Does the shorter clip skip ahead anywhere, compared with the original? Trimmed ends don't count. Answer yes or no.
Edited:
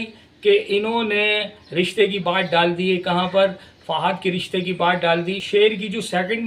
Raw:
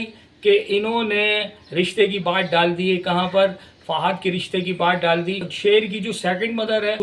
yes